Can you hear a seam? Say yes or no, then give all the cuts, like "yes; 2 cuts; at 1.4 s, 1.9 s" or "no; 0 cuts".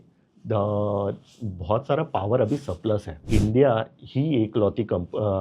yes; 1 cut; at 3.2 s